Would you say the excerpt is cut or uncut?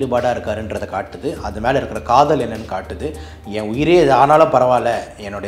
uncut